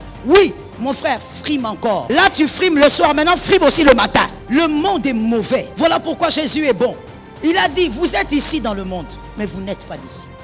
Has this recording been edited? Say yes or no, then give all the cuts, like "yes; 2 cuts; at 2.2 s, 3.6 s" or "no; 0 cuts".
yes; 3 cuts; at 2.1 s, 4.4 s, 5.7 s